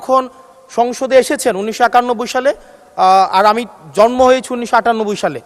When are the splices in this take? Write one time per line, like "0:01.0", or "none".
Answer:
none